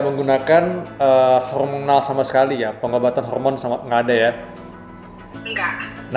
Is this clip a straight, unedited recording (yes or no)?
yes